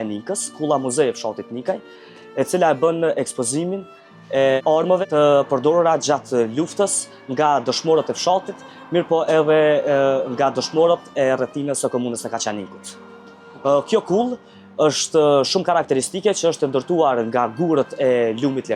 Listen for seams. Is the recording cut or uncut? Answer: cut